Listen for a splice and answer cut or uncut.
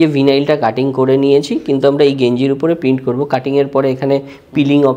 uncut